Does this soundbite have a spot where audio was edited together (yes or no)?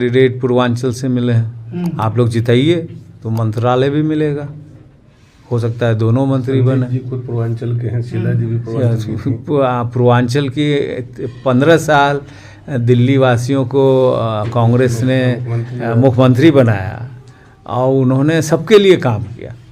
no